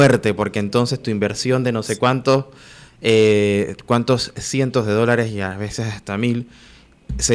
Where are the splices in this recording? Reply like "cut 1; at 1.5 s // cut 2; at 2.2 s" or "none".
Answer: none